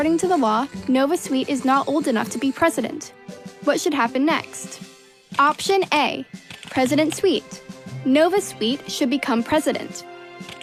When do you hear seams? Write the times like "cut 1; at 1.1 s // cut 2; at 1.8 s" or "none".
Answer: none